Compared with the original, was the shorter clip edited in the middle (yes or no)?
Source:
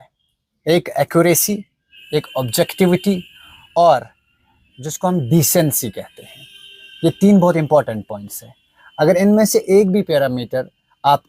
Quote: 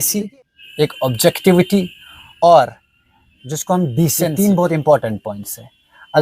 yes